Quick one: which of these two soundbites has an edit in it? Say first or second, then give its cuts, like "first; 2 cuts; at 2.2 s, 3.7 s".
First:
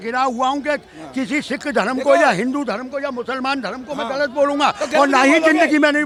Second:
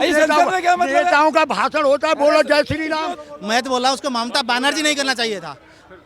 second; 1 cut; at 3.2 s